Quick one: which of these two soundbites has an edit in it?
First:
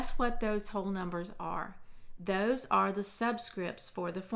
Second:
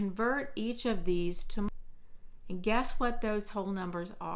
second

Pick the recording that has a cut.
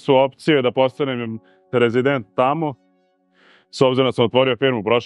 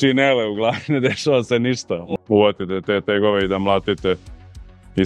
second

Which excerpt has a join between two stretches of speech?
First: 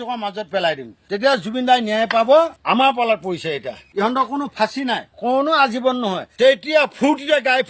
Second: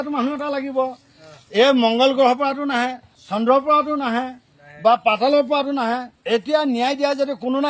first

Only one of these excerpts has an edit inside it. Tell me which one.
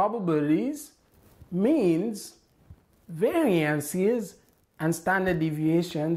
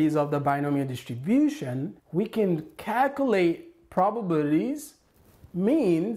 second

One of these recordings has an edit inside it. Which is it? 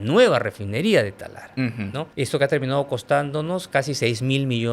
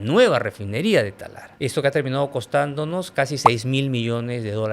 second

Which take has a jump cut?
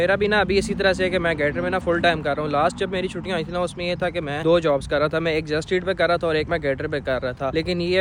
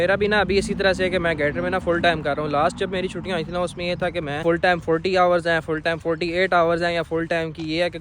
second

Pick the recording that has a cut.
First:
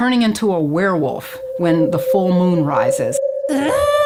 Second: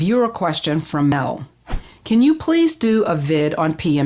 second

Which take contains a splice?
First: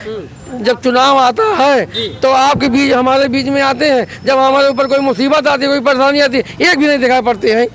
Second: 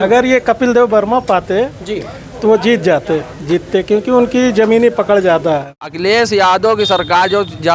second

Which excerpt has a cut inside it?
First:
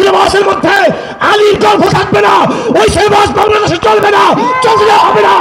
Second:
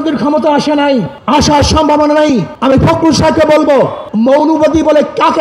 second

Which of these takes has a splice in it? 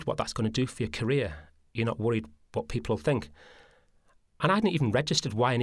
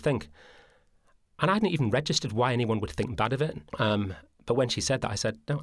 second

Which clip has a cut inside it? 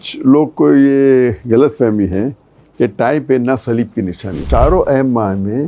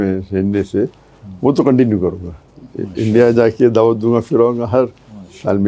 first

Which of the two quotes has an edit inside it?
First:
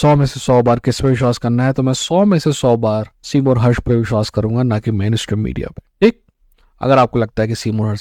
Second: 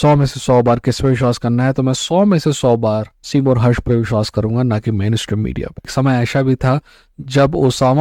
second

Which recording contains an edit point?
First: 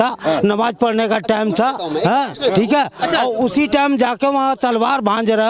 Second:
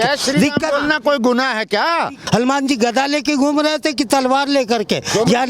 second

